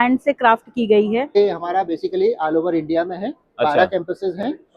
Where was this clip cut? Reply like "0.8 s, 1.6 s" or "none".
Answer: 1.4 s